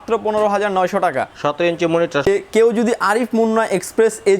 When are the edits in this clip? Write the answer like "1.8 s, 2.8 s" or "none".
2.3 s